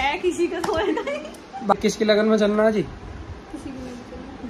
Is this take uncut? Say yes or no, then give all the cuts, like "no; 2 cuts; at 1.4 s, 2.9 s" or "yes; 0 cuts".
no; 1 cut; at 1.7 s